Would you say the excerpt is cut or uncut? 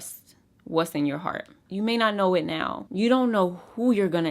cut